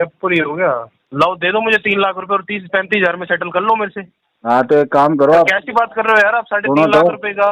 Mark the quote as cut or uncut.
cut